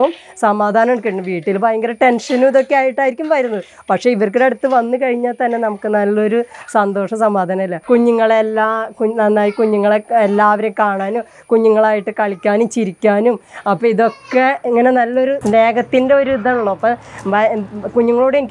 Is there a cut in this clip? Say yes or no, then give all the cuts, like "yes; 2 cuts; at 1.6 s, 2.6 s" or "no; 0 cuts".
yes; 2 cuts; at 7.8 s, 15.4 s